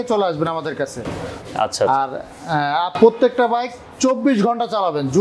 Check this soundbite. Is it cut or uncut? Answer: uncut